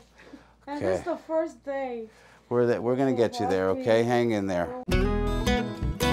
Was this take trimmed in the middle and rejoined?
yes; 1 cut; at 4.8 s

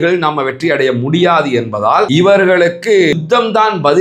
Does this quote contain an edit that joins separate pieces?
yes; 1 cut; at 2.1 s

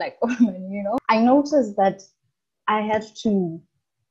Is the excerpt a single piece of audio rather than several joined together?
no; 1 cut; at 1.0 s

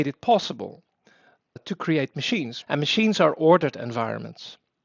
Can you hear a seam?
yes; 1 cut; at 2.5 s

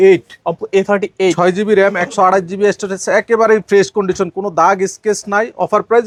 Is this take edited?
no; 0 cuts

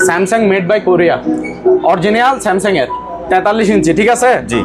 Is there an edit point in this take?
no; 0 cuts

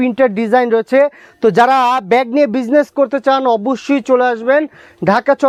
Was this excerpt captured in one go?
yes; 0 cuts

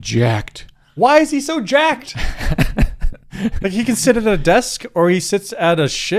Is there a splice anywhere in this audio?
no; 0 cuts

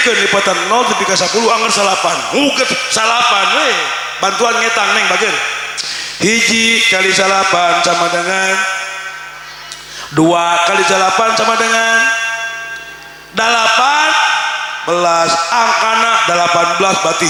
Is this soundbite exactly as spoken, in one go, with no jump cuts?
yes; 0 cuts

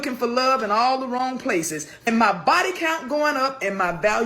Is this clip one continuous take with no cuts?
no; 1 cut; at 2.1 s

